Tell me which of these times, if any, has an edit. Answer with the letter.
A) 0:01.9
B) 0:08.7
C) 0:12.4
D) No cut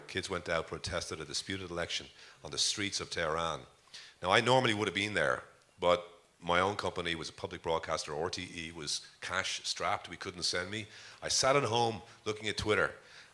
B